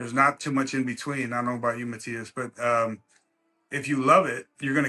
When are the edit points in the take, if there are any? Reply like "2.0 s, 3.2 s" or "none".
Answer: none

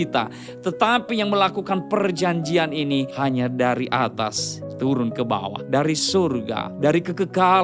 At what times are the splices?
3.1 s, 5.6 s, 6.7 s

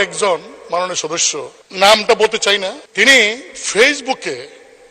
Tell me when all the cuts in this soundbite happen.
1.6 s, 2.8 s

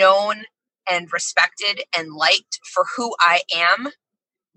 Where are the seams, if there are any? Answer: none

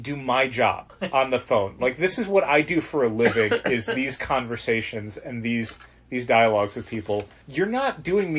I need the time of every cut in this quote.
0.9 s, 7.4 s

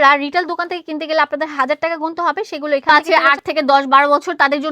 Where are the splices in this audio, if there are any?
2.9 s

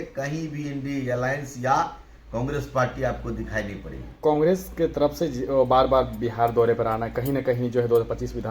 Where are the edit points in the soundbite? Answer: none

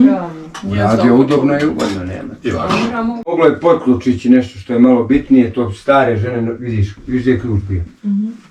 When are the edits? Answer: 3.2 s

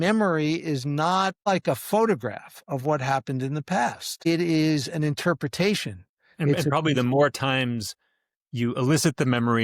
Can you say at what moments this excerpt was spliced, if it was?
1.5 s, 4.3 s

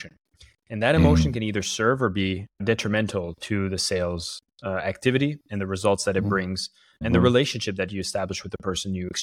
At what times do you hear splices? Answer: none

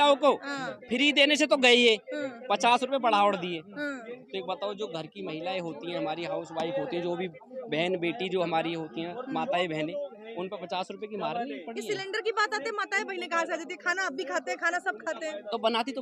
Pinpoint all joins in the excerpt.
none

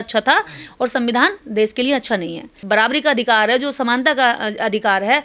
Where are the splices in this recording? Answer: 2.5 s

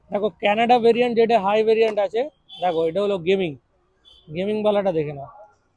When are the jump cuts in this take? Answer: none

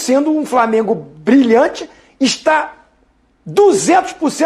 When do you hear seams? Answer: none

